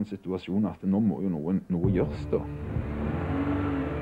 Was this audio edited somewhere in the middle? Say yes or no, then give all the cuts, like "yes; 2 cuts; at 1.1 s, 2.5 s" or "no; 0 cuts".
no; 0 cuts